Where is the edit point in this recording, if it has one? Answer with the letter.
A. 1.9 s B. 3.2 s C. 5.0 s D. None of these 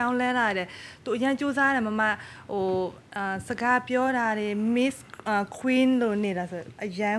D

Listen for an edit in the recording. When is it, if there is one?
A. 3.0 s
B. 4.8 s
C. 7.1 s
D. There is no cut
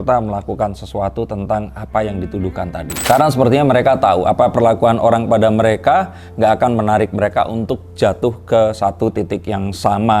A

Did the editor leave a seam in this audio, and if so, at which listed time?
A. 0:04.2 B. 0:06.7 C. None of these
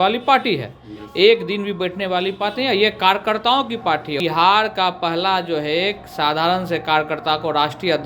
A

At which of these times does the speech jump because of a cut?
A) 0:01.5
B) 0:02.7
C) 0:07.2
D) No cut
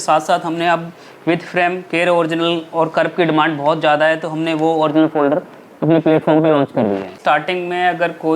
C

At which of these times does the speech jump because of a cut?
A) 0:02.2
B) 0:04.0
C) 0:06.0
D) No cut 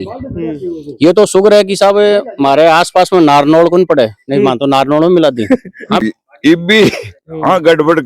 C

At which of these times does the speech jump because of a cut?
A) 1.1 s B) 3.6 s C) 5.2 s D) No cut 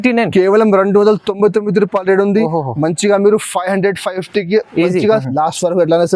C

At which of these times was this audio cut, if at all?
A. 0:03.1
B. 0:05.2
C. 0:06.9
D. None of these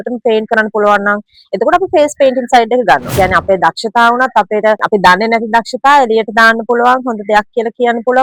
A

